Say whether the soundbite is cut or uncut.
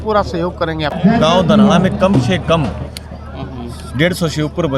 cut